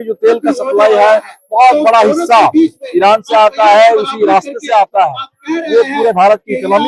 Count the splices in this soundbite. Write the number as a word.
zero